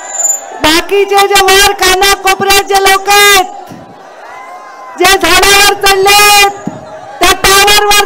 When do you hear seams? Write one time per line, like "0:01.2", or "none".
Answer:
none